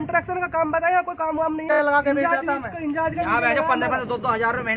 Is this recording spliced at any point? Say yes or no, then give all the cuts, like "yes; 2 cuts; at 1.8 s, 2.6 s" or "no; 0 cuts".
yes; 1 cut; at 1.7 s